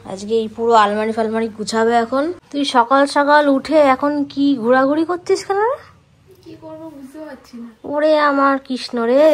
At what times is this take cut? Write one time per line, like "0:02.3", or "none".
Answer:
0:02.4